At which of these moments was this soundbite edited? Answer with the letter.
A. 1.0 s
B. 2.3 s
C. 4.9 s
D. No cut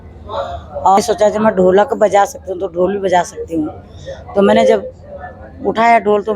A